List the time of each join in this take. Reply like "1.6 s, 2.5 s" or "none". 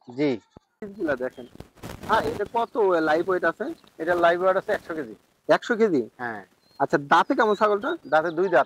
0.9 s